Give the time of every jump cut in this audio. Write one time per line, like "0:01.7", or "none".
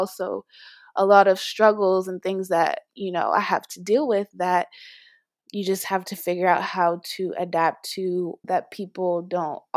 0:08.4